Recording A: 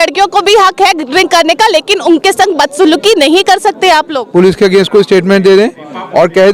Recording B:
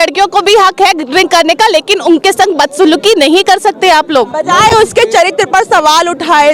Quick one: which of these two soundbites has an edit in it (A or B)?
A